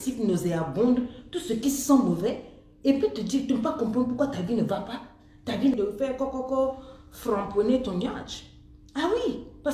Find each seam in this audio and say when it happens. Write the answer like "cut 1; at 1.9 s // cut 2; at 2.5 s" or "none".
cut 1; at 5.8 s